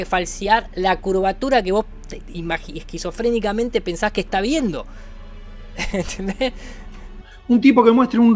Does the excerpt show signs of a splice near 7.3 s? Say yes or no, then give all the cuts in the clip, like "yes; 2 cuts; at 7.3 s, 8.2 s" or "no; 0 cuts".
yes; 1 cut; at 7.3 s